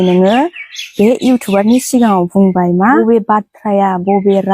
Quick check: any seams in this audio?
yes; 1 cut; at 3.0 s

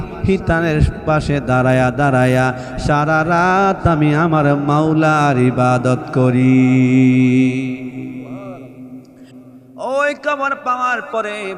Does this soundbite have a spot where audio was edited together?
yes; 1 cut; at 9.4 s

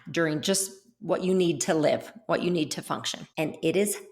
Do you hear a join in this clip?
yes; 1 cut; at 3.2 s

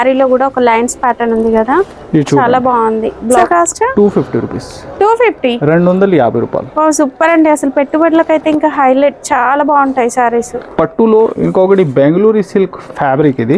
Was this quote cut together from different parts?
yes; 2 cuts; at 3.4 s, 10.6 s

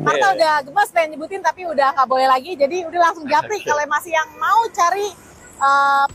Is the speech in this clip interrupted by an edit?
no; 0 cuts

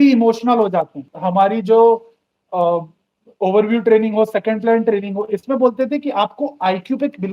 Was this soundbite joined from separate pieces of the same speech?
yes; 1 cut; at 1.1 s

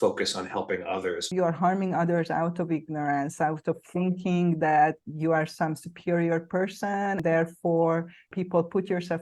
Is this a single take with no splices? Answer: no; 4 cuts; at 1.3 s, 5.1 s, 7.2 s, 8.3 s

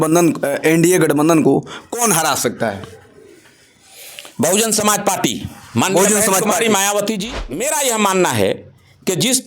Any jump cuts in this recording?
yes; 1 cut; at 7.7 s

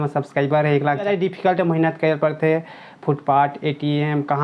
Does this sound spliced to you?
yes; 1 cut; at 1.0 s

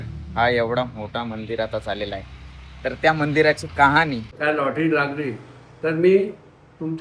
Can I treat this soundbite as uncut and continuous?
no; 1 cut; at 4.3 s

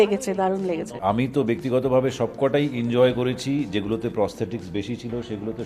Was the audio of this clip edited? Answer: yes; 1 cut; at 0.9 s

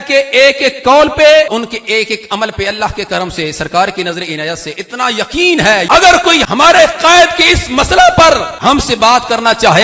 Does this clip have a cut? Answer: yes; 3 cuts; at 1.5 s, 6.4 s, 8.5 s

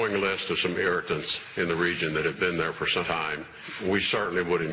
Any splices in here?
yes; 1 cut; at 3.1 s

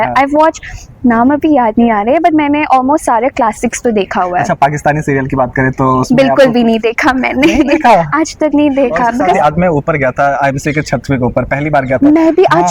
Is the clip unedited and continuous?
no; 1 cut; at 9.4 s

